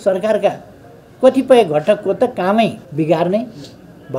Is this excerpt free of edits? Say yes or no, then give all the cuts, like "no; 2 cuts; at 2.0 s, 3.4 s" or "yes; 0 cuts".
no; 1 cut; at 2.8 s